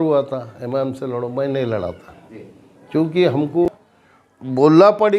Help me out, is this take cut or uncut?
cut